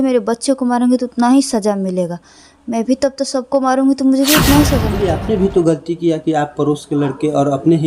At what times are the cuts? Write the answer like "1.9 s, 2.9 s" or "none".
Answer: 4.9 s